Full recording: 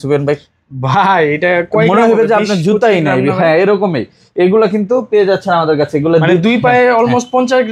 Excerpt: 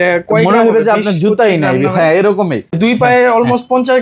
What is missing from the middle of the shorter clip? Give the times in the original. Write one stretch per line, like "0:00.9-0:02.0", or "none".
0:04.2-0:06.4